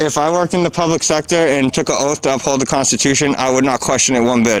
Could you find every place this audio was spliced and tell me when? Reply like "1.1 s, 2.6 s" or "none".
none